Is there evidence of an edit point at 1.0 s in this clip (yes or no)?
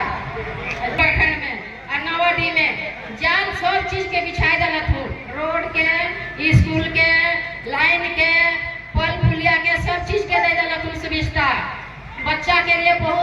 yes